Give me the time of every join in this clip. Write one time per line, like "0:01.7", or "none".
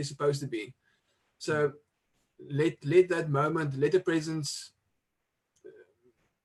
none